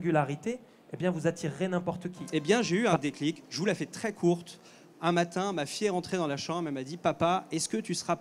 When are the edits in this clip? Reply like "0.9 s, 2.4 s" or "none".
2.2 s